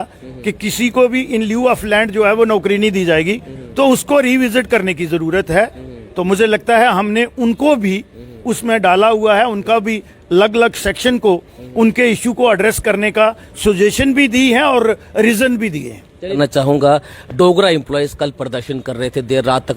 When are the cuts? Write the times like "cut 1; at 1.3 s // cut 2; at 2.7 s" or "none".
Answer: cut 1; at 16.4 s

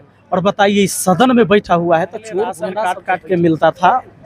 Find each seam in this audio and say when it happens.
cut 1; at 2.7 s

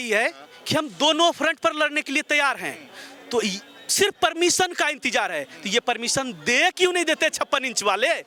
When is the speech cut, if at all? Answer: none

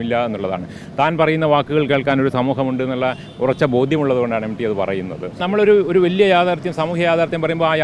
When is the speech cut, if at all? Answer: cut 1; at 5.3 s

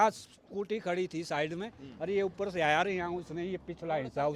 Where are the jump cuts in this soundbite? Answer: none

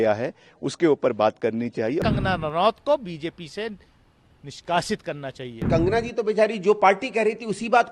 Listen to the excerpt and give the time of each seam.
cut 1; at 2.0 s // cut 2; at 5.7 s

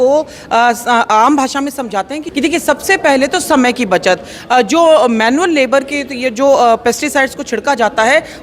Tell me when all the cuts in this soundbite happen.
cut 1; at 2.2 s

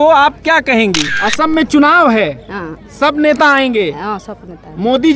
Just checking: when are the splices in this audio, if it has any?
cut 1; at 1.1 s

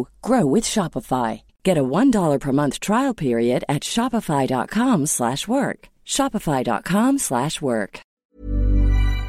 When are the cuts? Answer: cut 1; at 8.0 s

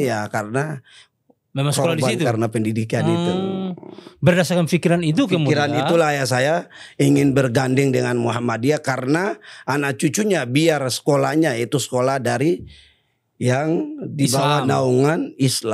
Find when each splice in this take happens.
none

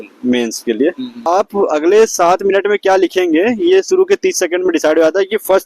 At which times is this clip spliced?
cut 1; at 1.1 s

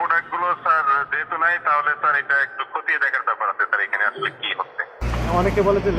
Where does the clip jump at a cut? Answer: cut 1; at 5.1 s

